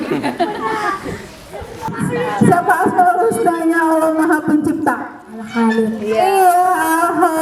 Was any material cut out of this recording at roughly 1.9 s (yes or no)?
yes